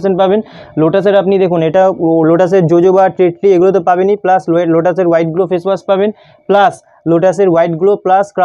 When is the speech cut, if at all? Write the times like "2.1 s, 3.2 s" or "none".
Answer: none